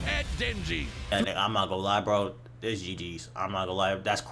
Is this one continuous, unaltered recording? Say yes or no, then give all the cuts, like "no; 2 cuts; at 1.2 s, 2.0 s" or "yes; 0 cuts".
no; 1 cut; at 1.1 s